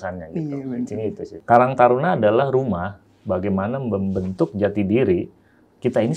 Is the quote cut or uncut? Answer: cut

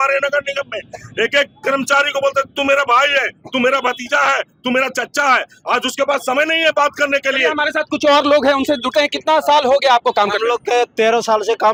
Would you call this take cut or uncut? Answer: uncut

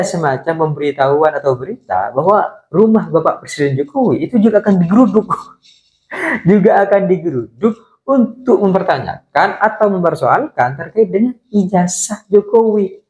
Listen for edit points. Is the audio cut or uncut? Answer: uncut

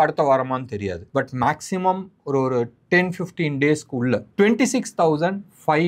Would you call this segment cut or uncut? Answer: cut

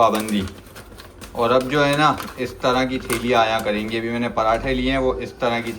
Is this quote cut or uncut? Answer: uncut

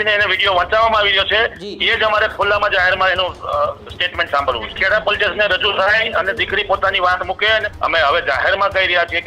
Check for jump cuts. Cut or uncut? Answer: cut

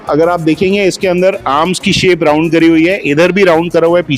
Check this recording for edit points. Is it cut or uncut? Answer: uncut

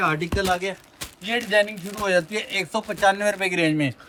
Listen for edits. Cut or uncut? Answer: uncut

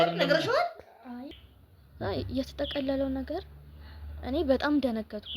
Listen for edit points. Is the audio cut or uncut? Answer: cut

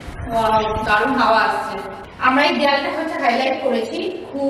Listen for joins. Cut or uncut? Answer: cut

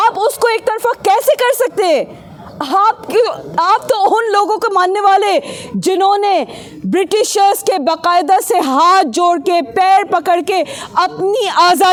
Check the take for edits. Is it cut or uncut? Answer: uncut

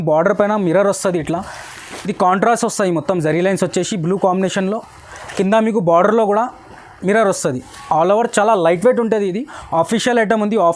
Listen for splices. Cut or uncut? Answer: uncut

